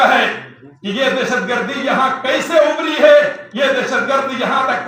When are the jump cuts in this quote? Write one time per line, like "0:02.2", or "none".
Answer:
none